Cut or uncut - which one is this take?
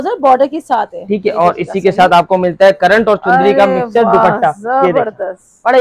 uncut